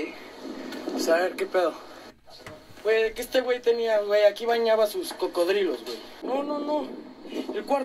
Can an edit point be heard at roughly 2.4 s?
no; 1 cut; at 6.2 s

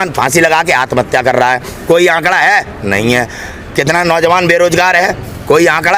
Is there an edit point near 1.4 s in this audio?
no; 0 cuts

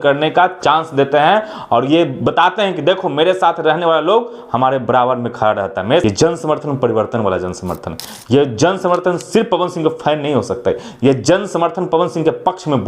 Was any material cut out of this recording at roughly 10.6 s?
no; 1 cut; at 6.0 s

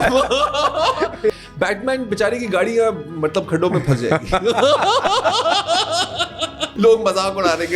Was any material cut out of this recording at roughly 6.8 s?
yes; 2 cuts; at 1.4 s, 6.8 s

